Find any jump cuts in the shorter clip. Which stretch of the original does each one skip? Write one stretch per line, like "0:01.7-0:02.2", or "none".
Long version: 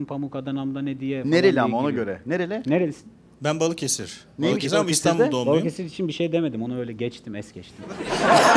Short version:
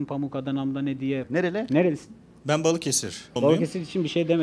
0:01.2-0:02.2
0:04.3-0:05.4